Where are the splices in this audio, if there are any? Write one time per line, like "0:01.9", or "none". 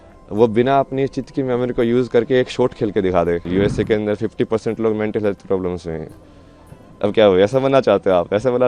0:03.4

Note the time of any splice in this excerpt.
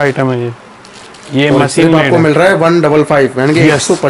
none

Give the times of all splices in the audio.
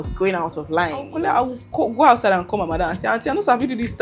0:01.1

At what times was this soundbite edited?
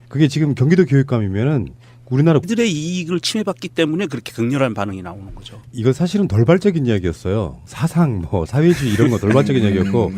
none

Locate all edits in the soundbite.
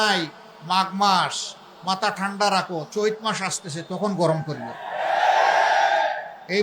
none

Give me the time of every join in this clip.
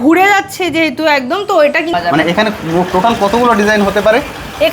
0:01.9

